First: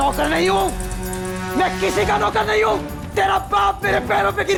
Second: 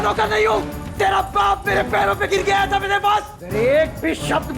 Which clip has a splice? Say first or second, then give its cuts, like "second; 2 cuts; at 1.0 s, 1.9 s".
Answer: second; 1 cut; at 3.4 s